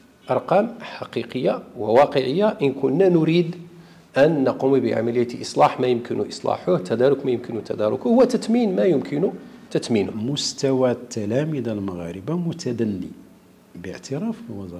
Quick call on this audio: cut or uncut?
cut